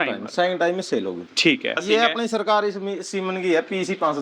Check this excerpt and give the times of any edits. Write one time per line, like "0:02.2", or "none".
0:01.8